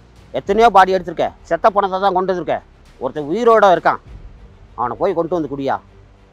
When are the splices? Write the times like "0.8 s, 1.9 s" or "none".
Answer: 1.4 s